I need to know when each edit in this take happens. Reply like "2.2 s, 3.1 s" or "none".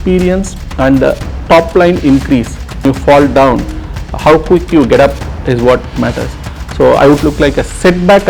2.8 s, 7.2 s